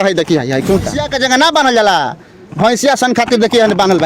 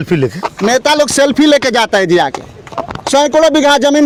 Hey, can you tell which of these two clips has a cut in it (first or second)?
first